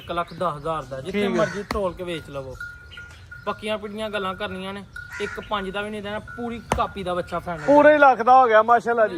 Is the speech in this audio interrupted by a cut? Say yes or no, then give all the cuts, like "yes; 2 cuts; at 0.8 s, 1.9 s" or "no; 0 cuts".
no; 0 cuts